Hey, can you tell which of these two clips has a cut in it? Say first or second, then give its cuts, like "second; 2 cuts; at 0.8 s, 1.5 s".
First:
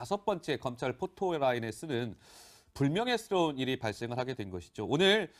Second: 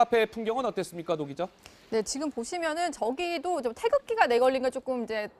second; 1 cut; at 4.3 s